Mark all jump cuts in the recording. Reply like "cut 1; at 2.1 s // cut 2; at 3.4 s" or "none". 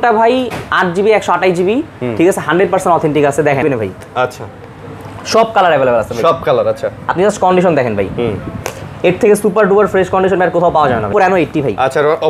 cut 1; at 3.6 s // cut 2; at 11.1 s

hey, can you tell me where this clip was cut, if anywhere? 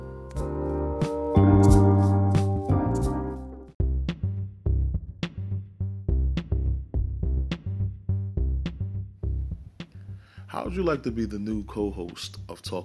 cut 1; at 3.6 s

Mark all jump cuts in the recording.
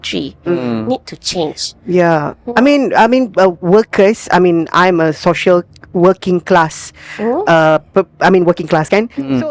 none

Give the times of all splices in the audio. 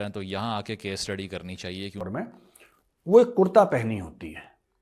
cut 1; at 2.0 s

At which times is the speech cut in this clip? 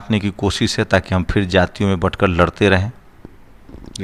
none

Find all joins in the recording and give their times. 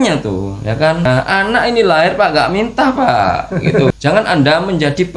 cut 1; at 1.1 s // cut 2; at 3.9 s

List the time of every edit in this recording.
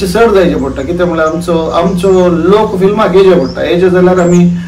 none

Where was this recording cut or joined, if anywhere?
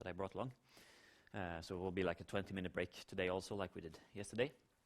cut 1; at 3.0 s

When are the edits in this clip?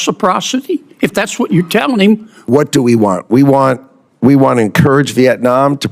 cut 1; at 2.3 s

